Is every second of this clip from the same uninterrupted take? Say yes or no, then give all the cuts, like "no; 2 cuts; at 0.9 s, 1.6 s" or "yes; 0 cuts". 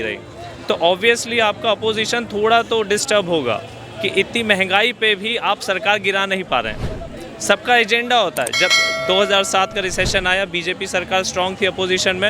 yes; 0 cuts